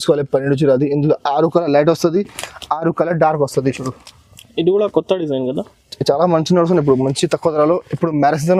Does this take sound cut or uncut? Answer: uncut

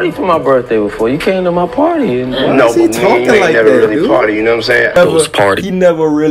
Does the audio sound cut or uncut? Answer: cut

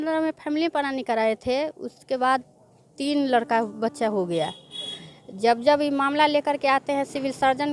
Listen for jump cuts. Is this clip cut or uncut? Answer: uncut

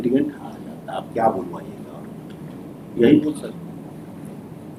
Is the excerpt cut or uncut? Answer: uncut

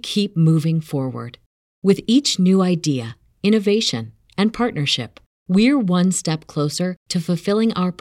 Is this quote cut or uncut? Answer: uncut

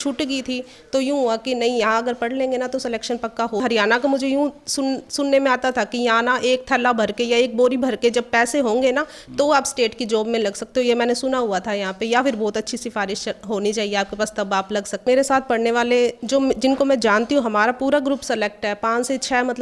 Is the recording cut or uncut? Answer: cut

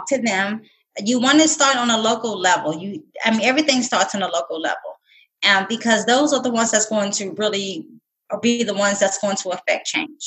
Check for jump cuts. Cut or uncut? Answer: uncut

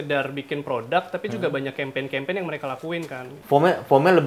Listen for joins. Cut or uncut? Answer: cut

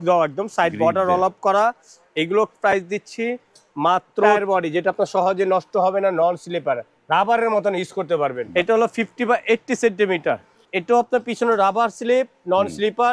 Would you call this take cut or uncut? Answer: cut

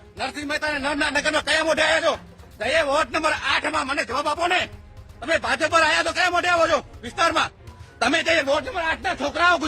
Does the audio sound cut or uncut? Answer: uncut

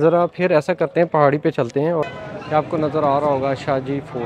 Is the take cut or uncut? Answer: cut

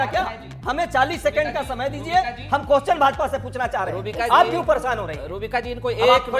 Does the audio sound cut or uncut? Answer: uncut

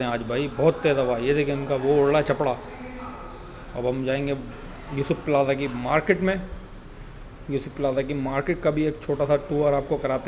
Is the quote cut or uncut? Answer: uncut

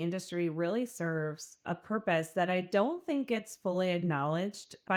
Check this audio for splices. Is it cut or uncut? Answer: uncut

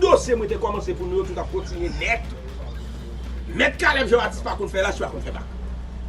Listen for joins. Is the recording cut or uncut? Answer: uncut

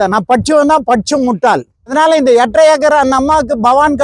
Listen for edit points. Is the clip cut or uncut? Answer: cut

